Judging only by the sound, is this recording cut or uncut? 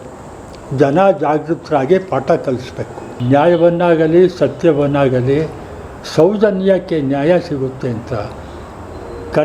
uncut